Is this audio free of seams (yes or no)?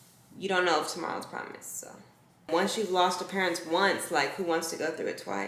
no